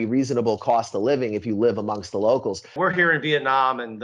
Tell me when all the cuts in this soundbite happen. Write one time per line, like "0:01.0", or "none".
0:02.8